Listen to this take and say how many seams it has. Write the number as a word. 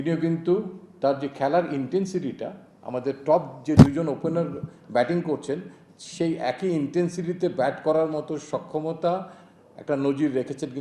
zero